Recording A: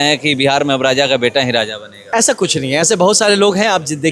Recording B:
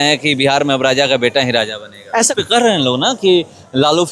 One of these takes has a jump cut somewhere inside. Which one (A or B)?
B